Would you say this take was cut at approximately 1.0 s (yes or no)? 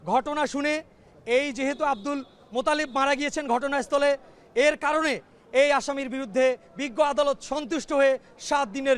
no